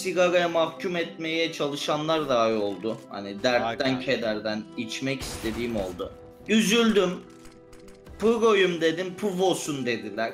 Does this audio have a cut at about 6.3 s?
yes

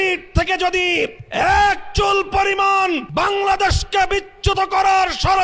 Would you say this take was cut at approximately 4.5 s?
no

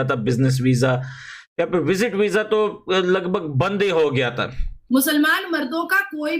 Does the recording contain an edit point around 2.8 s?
no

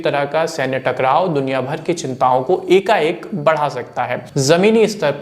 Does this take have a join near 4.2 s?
yes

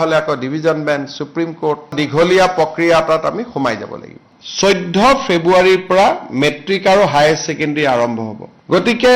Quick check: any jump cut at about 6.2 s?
no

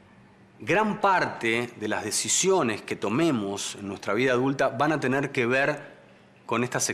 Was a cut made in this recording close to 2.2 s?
no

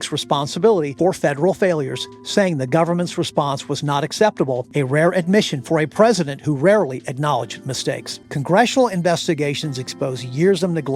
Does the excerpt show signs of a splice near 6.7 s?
no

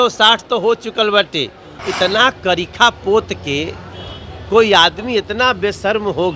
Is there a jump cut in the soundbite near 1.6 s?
yes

